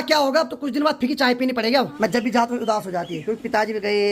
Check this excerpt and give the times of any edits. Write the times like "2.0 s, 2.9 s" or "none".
1.9 s